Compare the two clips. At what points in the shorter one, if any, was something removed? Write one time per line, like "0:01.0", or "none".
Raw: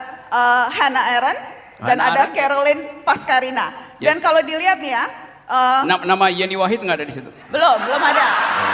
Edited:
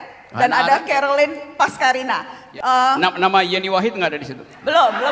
0:02.4